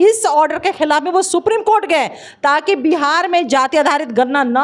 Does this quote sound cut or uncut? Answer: uncut